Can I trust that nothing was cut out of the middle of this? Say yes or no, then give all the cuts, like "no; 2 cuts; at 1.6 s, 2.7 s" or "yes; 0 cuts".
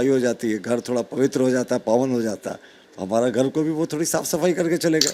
yes; 0 cuts